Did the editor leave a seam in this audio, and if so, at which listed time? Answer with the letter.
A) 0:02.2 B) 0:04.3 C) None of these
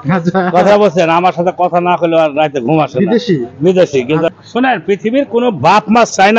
B